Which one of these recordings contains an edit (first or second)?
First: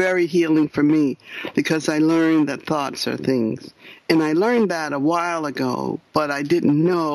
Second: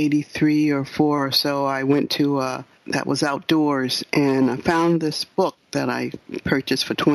second